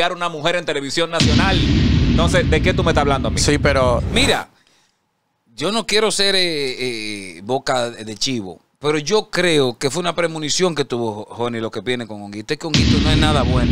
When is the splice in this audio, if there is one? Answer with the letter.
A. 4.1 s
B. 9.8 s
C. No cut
A